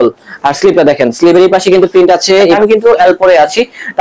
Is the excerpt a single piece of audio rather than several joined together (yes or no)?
no